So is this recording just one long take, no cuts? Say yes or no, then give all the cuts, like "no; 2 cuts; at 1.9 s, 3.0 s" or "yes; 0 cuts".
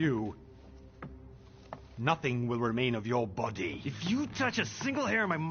no; 1 cut; at 3.9 s